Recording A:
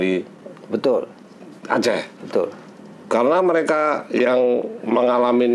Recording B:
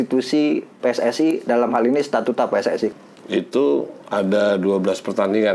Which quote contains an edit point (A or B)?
B